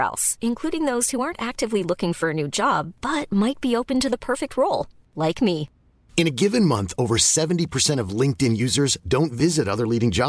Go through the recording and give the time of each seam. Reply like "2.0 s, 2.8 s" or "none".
none